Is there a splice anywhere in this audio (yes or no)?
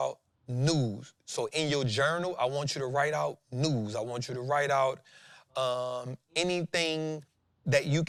no